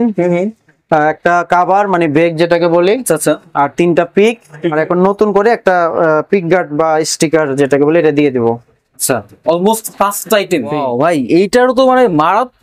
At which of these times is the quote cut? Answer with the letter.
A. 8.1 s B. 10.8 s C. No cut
B